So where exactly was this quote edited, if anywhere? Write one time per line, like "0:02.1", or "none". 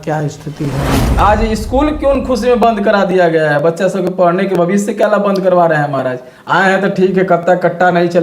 0:01.2